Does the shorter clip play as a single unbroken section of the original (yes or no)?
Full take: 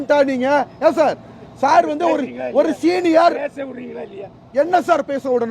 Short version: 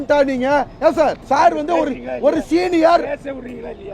no